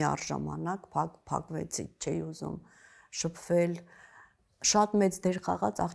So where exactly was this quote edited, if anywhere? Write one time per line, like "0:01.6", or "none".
none

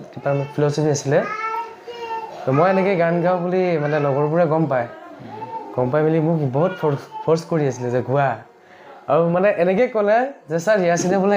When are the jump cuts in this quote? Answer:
none

